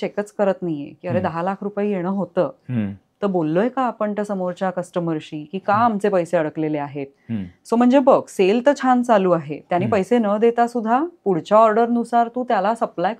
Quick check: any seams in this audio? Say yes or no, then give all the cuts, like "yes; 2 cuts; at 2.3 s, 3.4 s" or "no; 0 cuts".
no; 0 cuts